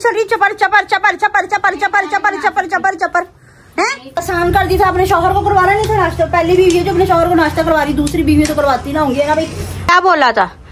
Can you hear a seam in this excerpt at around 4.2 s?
yes; 2 cuts; at 4.2 s, 9.9 s

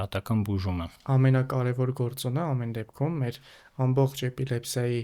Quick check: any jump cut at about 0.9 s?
yes; 1 cut; at 0.9 s

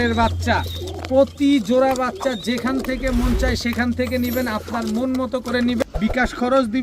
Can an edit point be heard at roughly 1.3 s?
no; 1 cut; at 5.8 s

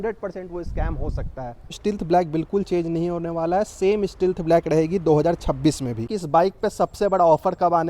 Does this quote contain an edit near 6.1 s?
yes; 2 cuts; at 1.7 s, 6.1 s

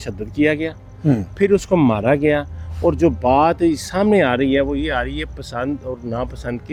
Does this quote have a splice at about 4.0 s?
no; 0 cuts

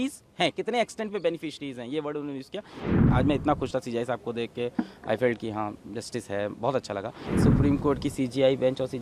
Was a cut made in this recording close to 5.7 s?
no; 2 cuts; at 2.9 s, 7.3 s

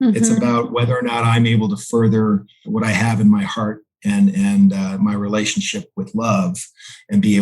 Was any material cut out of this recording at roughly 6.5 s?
no; 1 cut; at 2.6 s

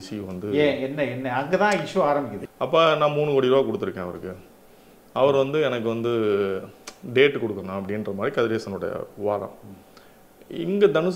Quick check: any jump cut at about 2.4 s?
yes; 1 cut; at 2.4 s

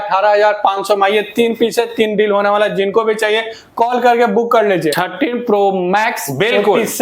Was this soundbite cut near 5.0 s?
yes; 1 cut; at 5.0 s

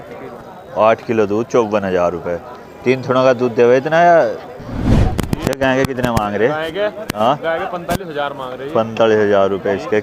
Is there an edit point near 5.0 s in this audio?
yes; 1 cut; at 5.0 s

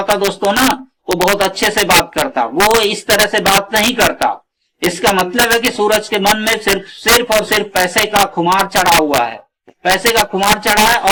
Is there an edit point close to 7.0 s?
no; 0 cuts

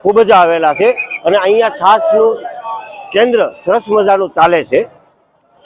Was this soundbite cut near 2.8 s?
no; 0 cuts

